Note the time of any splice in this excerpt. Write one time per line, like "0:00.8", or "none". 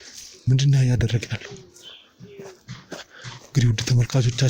none

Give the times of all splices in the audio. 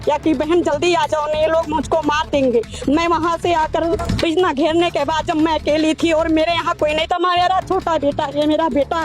0:04.0

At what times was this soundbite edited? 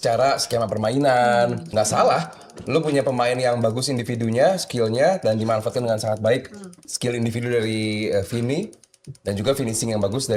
0:01.7
0:06.8

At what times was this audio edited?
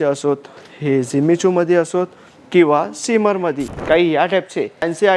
0:03.7

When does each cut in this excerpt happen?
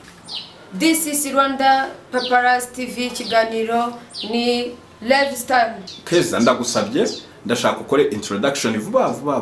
0:05.8

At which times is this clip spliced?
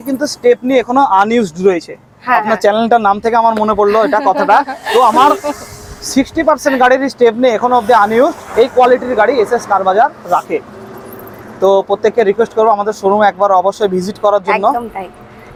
none

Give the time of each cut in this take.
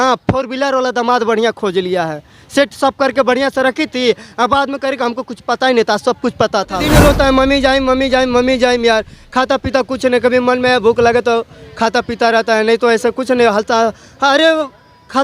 0:06.8

